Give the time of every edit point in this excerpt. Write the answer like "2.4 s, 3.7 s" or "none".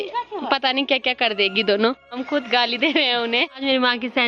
2.2 s, 3.6 s